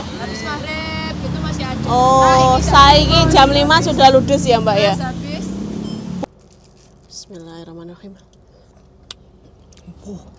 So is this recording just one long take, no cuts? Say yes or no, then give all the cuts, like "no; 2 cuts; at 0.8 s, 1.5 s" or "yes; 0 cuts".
no; 1 cut; at 6.2 s